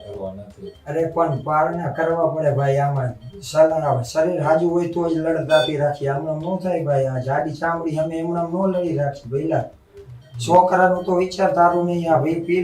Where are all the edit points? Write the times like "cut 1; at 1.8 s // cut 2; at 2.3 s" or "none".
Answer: none